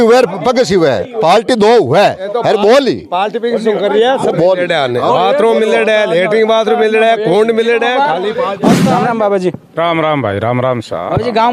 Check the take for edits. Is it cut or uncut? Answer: cut